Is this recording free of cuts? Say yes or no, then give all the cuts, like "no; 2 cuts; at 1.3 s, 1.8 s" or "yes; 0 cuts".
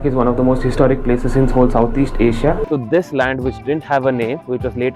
no; 1 cut; at 2.7 s